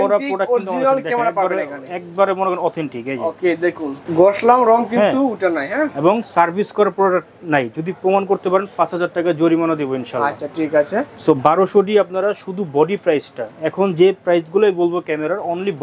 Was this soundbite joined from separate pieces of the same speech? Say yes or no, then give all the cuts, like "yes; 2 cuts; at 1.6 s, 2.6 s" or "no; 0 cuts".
no; 0 cuts